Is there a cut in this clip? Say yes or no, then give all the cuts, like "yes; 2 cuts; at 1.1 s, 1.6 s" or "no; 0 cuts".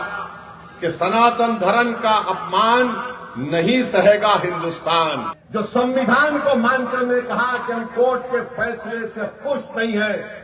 yes; 1 cut; at 5.4 s